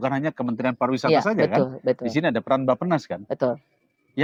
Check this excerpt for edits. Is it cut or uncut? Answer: uncut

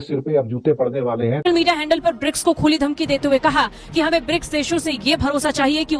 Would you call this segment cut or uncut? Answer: cut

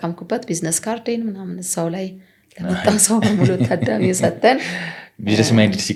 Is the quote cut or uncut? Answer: uncut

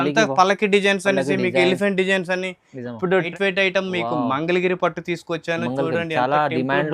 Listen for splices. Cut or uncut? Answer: cut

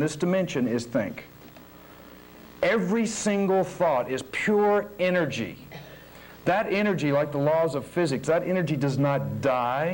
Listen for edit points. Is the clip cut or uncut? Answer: uncut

